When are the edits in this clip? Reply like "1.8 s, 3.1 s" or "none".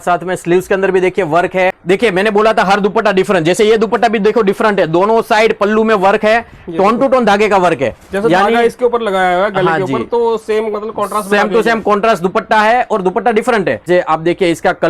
1.8 s, 13.9 s